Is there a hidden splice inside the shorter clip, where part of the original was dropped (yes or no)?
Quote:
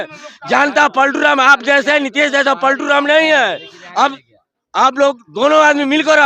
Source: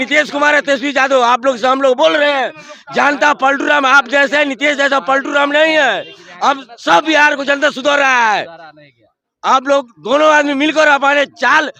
yes